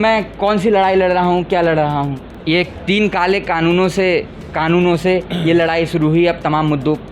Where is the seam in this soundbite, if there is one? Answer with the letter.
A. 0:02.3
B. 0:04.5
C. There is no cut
A